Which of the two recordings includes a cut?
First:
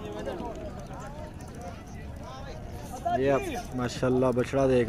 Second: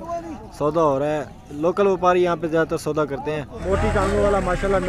second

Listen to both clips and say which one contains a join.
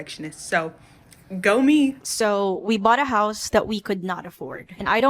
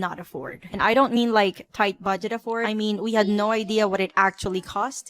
first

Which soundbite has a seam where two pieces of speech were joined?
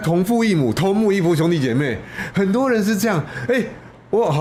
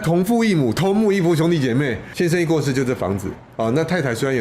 second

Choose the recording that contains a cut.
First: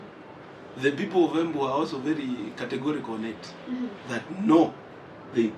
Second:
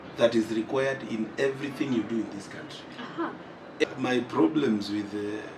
second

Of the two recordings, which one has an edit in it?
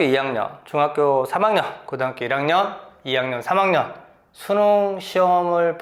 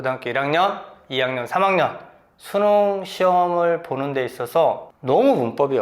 second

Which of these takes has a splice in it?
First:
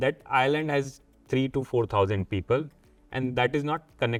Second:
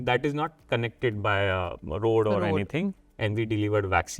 second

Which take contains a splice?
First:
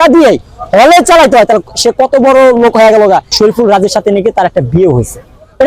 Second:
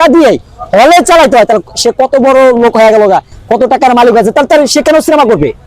first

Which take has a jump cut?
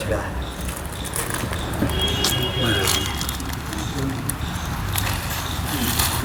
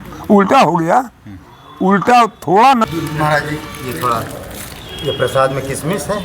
second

